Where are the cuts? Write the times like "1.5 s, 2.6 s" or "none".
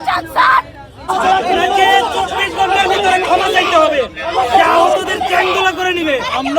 1.1 s